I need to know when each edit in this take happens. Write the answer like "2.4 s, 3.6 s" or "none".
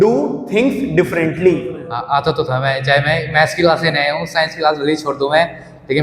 1.8 s